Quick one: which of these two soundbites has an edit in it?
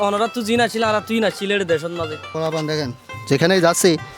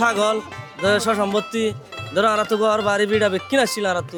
first; 1 cut; at 2.3 s

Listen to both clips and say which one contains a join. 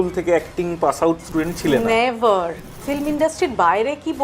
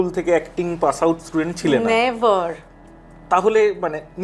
first; 1 cut; at 2.9 s

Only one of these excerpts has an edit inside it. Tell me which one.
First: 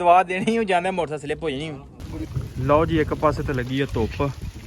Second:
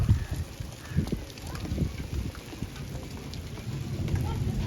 first; 1 cut; at 2.4 s

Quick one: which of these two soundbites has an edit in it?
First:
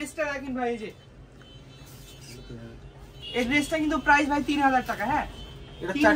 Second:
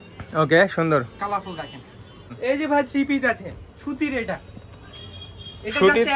second; 1 cut; at 2.2 s

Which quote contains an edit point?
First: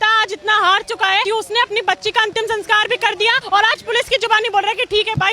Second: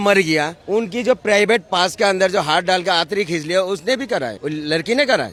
first; 2 cuts; at 1.2 s, 3.4 s

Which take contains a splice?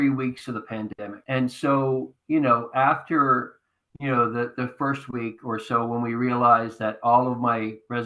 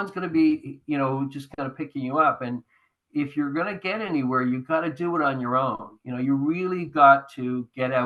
first; 1 cut; at 1.1 s

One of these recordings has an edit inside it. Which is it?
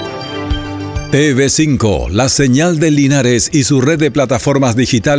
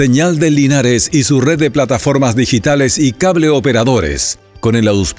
first; 1 cut; at 1.0 s

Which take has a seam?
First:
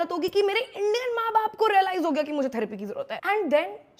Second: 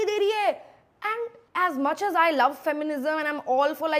first; 1 cut; at 3.1 s

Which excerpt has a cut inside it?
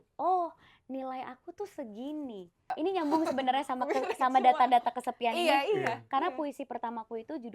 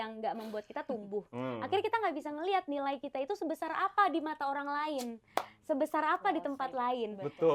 first; 1 cut; at 2.7 s

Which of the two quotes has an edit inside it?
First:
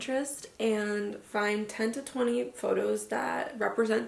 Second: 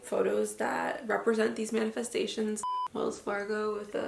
second; 1 cut; at 2.7 s

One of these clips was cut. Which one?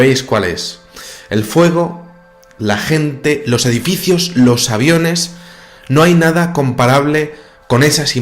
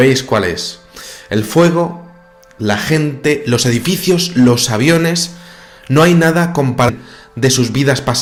first; 1 cut; at 6.9 s

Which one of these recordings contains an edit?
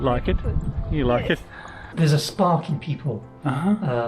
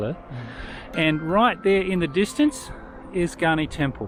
first; 1 cut; at 1.9 s

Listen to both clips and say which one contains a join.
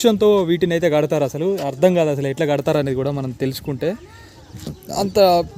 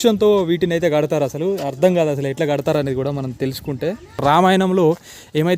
second; 1 cut; at 4.2 s

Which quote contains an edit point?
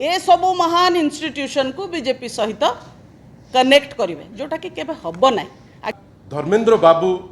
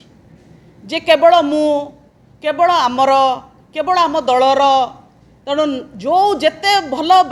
first; 1 cut; at 5.8 s

